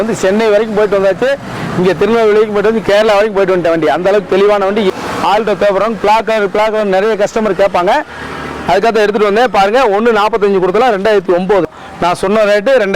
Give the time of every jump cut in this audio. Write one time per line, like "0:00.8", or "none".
0:04.9
0:11.7